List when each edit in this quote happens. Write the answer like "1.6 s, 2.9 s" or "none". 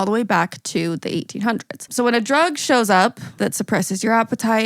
1.8 s, 3.4 s